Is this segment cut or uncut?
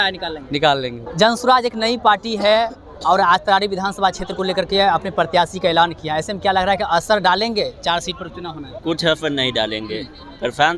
uncut